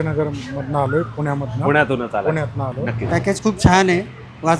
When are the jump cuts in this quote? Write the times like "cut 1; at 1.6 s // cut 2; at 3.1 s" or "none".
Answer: cut 1; at 3.0 s